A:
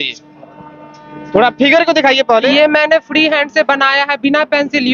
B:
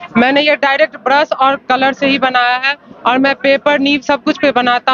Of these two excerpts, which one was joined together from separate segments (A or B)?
A